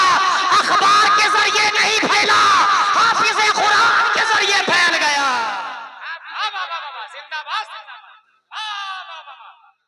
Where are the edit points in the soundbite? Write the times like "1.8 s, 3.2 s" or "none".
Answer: 5.7 s